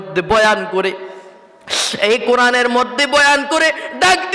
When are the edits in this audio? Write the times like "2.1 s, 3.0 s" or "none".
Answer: none

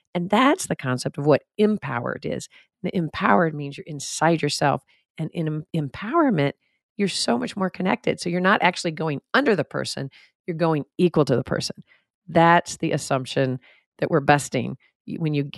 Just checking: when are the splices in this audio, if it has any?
none

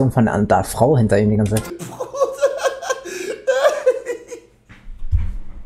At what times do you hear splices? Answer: 1.8 s

